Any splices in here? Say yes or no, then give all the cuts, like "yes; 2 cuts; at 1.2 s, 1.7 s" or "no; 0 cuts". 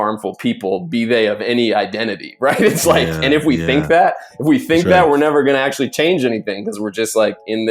no; 0 cuts